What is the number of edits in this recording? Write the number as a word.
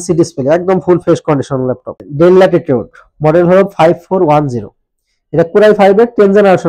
one